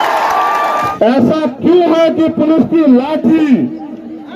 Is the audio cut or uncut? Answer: cut